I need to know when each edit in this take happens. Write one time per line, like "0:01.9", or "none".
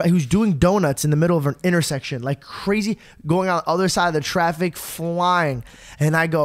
none